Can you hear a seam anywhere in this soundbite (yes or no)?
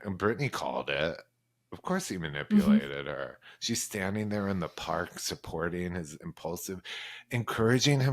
no